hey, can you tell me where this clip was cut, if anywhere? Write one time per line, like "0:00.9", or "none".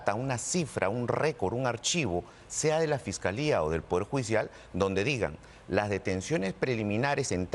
none